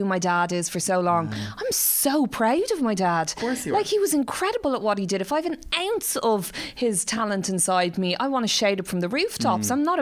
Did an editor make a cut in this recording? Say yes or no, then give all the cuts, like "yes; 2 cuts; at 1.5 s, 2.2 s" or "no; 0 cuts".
no; 0 cuts